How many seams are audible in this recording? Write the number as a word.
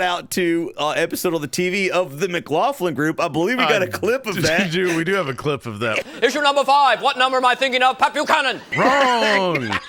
zero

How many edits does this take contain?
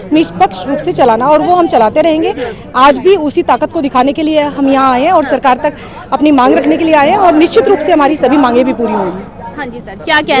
zero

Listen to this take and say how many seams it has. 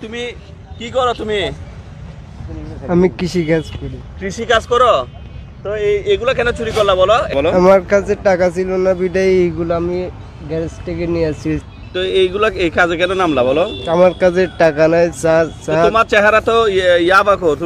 two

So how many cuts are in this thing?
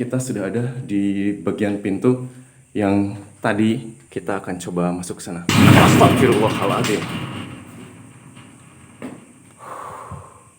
one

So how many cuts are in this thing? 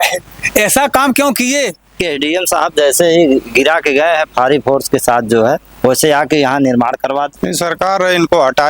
two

